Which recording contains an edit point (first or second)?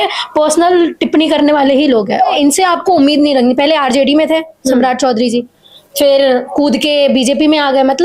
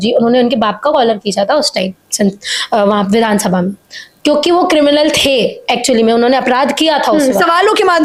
first